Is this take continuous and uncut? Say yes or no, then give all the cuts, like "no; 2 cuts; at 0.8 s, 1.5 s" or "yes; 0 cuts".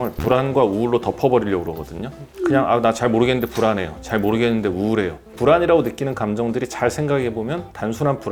yes; 0 cuts